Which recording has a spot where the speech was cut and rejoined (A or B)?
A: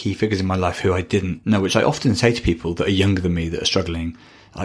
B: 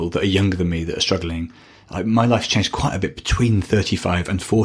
A